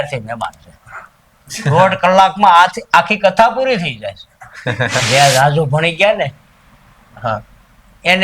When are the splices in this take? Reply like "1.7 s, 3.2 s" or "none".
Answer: 5.0 s